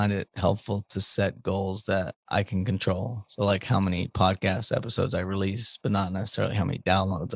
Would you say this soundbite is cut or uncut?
uncut